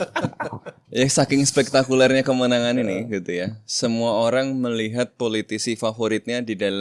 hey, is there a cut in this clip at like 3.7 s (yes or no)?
no